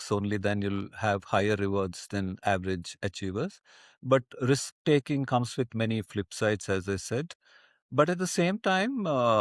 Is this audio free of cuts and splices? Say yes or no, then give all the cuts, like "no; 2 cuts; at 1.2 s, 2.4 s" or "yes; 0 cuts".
yes; 0 cuts